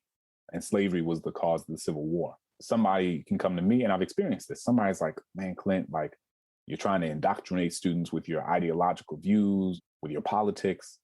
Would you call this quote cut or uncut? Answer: cut